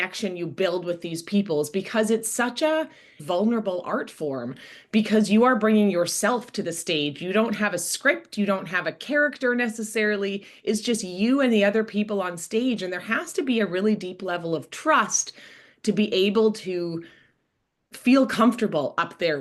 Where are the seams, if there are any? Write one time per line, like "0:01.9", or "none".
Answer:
0:03.2